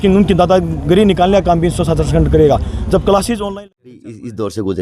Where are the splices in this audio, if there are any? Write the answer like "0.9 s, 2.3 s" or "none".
3.5 s